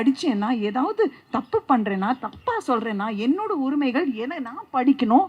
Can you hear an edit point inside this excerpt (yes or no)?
no